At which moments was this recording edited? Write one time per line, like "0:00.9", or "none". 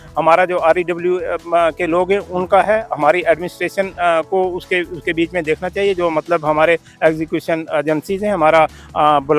none